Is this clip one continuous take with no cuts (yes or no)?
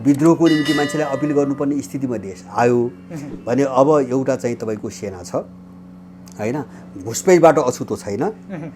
yes